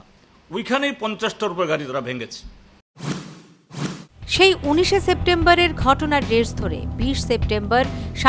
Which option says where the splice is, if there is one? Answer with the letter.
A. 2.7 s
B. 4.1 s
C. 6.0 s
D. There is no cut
D